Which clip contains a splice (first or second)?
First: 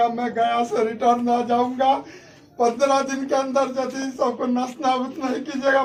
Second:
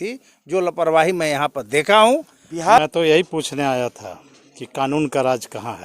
second